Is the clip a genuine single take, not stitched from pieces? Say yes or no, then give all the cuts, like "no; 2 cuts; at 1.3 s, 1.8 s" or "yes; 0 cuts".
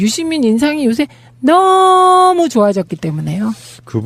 no; 1 cut; at 2.9 s